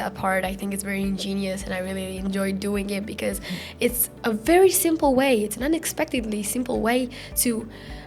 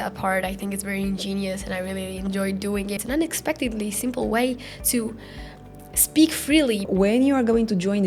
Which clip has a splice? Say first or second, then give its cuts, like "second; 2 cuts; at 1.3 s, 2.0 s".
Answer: second; 2 cuts; at 3.0 s, 6.9 s